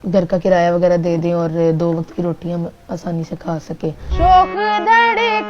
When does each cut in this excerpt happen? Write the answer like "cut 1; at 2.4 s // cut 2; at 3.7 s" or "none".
cut 1; at 4.0 s

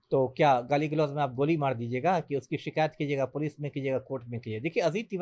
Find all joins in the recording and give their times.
none

